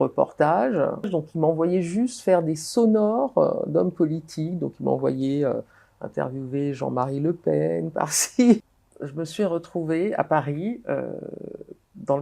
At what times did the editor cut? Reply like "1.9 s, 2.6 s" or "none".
1.1 s, 8.6 s